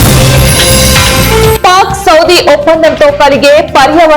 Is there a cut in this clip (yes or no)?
yes